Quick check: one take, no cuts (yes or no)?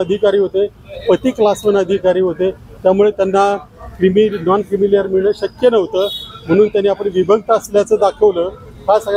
yes